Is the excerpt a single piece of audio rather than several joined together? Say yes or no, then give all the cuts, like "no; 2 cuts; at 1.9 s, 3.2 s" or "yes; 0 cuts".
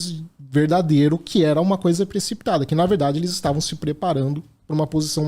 yes; 0 cuts